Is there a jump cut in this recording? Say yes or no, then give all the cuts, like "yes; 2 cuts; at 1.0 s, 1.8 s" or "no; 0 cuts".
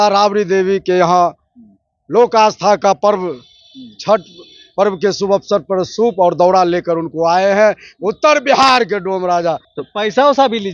yes; 1 cut; at 9.7 s